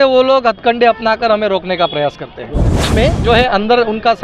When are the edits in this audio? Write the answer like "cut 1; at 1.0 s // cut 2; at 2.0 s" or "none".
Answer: cut 1; at 2.9 s